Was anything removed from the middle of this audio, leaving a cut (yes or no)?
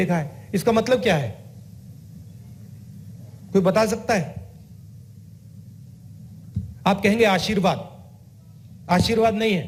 no